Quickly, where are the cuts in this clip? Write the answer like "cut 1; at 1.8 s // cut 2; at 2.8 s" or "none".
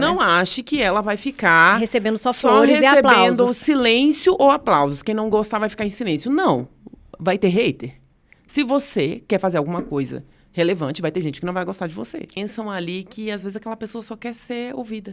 cut 1; at 12.4 s

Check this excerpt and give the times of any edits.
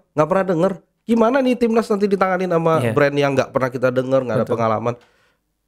none

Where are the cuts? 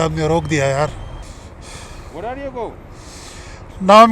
cut 1; at 1.2 s

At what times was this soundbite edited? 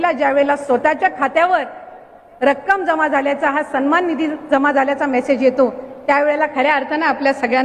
none

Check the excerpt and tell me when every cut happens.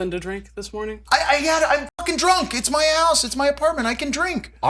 cut 1; at 1.0 s

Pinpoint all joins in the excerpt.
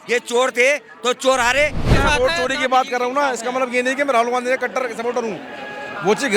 cut 1; at 1.9 s

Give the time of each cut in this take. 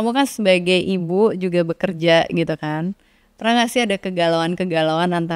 none

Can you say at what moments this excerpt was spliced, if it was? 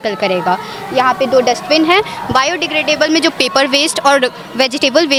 none

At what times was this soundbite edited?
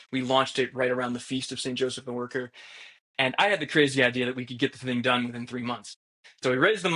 none

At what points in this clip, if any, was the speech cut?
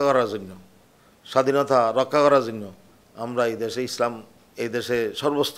none

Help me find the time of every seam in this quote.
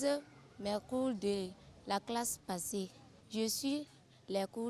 none

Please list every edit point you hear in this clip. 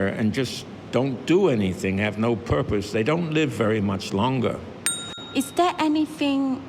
cut 1; at 5.2 s

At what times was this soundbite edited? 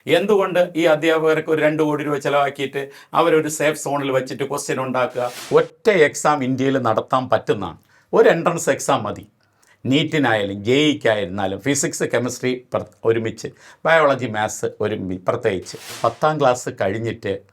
cut 1; at 5.4 s // cut 2; at 15.9 s

